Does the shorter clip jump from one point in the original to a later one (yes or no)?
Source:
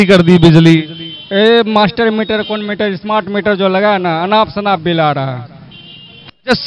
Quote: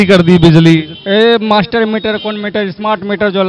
yes